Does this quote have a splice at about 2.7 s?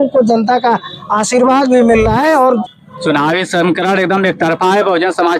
yes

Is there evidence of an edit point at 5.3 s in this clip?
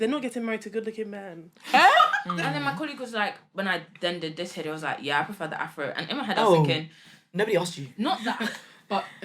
no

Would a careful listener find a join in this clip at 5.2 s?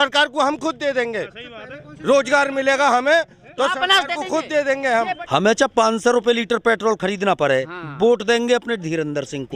yes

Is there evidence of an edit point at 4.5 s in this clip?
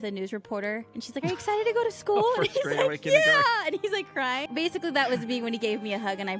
yes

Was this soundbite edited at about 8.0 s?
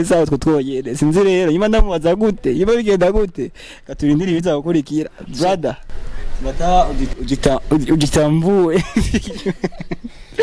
no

